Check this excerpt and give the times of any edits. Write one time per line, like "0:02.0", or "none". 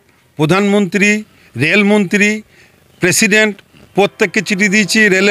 none